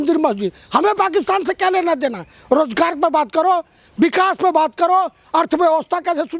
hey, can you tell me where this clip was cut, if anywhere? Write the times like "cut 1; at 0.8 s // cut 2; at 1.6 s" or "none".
none